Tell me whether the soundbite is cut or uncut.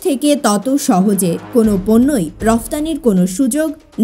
uncut